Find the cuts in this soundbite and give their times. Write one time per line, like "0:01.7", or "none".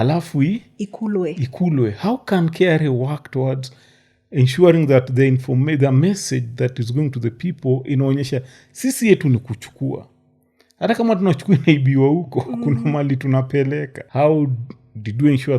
0:14.0

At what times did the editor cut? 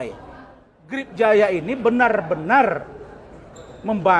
0:01.1

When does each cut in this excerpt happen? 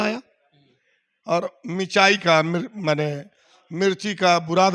none

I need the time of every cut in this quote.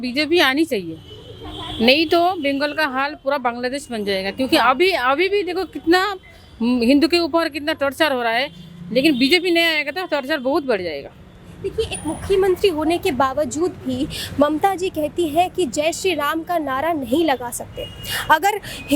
none

